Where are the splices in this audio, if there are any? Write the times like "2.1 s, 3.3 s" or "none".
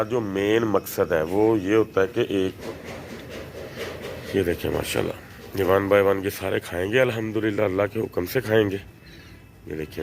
2.6 s